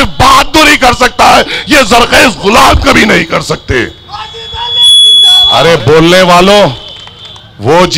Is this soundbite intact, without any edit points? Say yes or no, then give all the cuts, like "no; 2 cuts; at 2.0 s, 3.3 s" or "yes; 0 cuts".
no; 1 cut; at 5.5 s